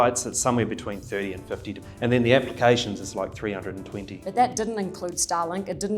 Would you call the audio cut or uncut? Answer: cut